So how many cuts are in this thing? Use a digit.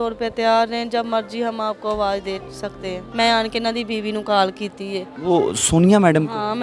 2